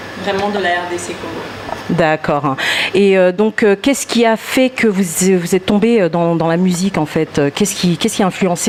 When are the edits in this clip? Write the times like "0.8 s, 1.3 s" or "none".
none

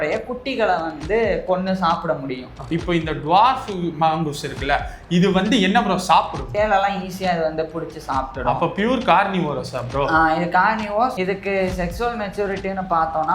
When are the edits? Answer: 2.6 s, 6.5 s, 11.2 s

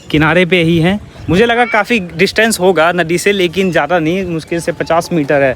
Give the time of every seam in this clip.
none

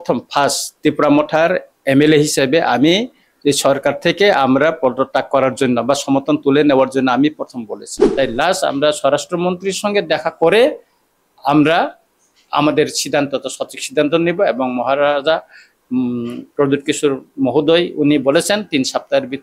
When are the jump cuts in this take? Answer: 7.9 s

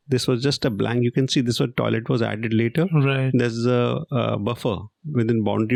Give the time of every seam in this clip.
none

